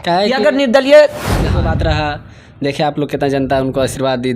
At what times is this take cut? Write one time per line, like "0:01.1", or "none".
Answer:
0:01.6